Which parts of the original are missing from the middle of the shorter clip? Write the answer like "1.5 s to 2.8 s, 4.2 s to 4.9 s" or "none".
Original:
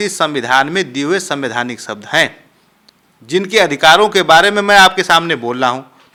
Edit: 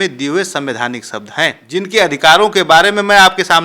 2.4 s to 3.2 s